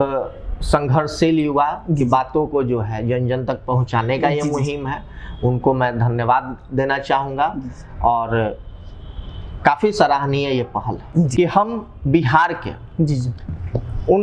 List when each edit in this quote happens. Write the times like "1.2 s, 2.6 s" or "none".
11.3 s